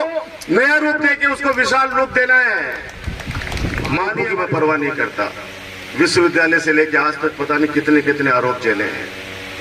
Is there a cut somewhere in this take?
yes; 1 cut; at 4.1 s

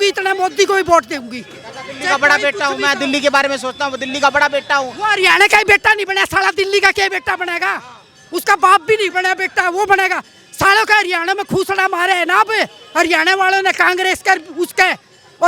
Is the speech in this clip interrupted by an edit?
no; 0 cuts

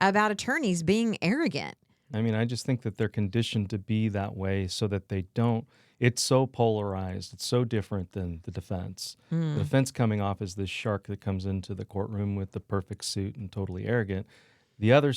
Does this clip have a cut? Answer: yes; 1 cut; at 2.0 s

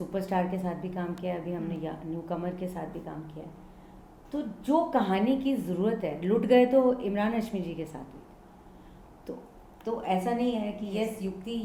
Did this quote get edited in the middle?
no; 0 cuts

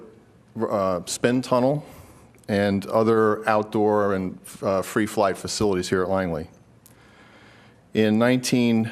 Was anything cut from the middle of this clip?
yes; 1 cut; at 4.4 s

